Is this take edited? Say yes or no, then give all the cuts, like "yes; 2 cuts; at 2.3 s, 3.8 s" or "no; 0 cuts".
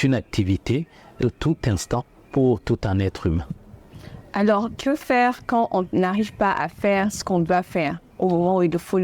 yes; 1 cut; at 1.2 s